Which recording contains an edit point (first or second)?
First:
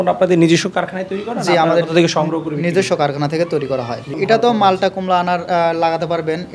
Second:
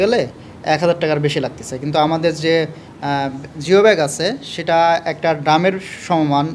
first